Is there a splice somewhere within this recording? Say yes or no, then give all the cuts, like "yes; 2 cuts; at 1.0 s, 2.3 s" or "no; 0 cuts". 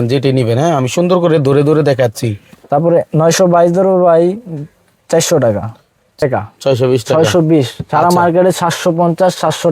yes; 1 cut; at 6.2 s